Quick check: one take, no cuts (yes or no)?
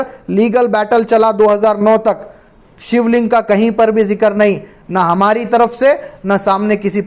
yes